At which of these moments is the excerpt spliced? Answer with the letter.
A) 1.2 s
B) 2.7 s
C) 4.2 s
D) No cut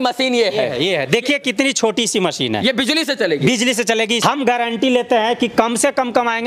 C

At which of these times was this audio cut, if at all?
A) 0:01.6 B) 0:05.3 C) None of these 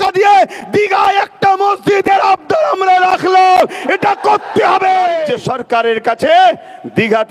B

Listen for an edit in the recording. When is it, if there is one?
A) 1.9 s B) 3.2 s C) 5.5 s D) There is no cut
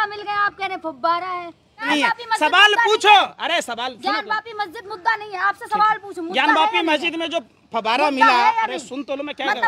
A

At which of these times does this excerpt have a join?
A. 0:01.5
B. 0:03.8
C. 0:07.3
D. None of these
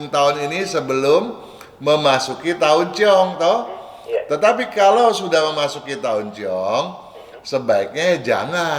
D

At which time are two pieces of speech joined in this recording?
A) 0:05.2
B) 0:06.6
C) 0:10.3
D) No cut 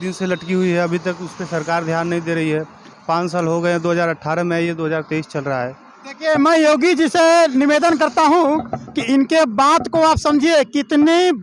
D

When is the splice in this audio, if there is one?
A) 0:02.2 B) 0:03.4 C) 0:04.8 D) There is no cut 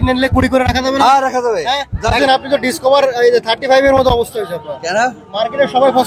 A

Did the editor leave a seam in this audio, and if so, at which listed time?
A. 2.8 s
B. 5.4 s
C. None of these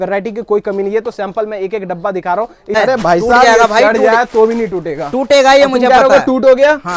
A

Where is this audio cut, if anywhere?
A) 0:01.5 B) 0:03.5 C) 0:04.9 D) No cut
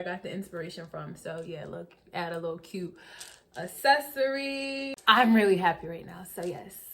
C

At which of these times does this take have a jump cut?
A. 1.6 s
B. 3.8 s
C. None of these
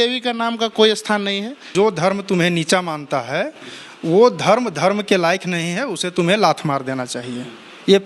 A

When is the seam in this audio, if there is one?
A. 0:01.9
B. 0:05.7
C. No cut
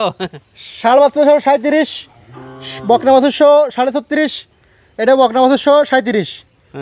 C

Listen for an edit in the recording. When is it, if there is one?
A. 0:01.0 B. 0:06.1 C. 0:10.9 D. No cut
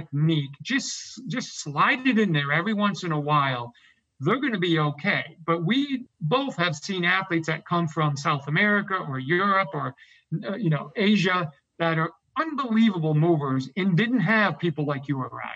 B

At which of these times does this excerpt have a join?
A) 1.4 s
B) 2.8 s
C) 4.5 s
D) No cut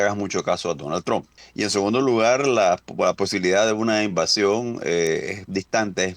A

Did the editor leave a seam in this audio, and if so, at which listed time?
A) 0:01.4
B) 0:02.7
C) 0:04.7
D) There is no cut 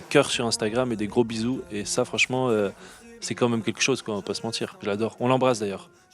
C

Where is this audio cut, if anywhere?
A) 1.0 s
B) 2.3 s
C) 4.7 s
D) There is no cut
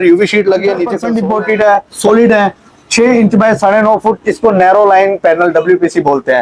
A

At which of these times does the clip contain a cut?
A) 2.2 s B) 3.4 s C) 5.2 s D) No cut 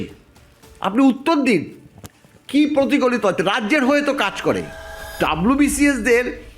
C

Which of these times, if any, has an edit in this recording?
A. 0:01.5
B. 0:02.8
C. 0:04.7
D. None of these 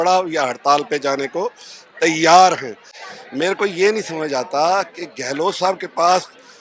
D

